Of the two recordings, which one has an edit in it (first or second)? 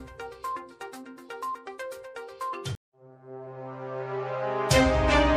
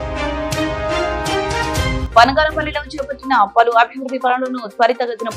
second